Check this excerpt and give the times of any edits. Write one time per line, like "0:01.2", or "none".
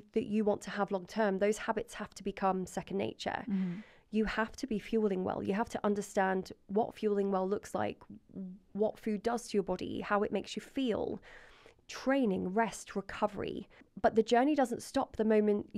0:13.8